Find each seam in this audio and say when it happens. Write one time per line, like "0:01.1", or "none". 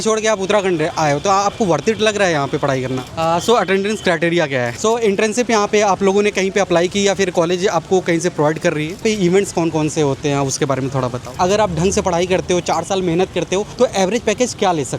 0:03.1
0:04.7
0:09.0
0:11.4
0:13.7